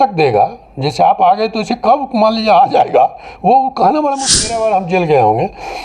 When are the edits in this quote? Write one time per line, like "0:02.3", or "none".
0:04.3